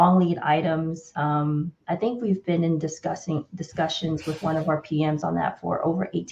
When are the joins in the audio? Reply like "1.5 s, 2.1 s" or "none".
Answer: 1.0 s